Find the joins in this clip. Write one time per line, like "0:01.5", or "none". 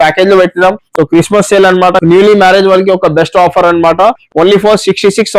0:02.0